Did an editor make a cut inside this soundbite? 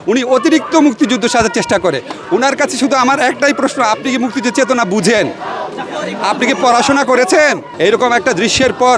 yes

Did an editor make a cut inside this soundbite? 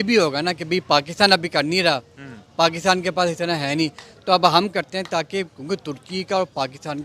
no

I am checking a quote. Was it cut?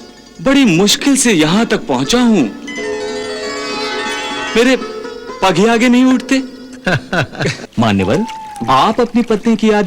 yes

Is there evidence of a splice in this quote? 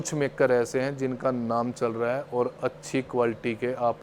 no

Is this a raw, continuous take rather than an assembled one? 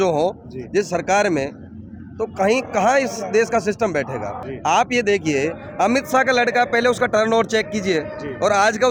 yes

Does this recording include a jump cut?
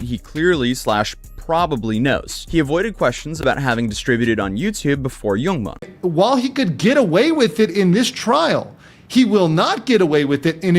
yes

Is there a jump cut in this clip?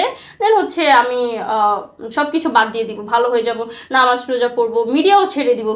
no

